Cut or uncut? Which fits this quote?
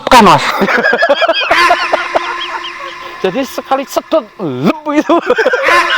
cut